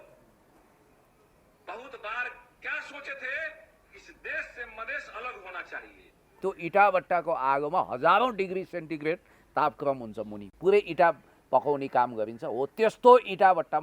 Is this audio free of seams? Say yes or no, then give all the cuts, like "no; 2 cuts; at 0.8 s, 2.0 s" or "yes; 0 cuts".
no; 1 cut; at 6.3 s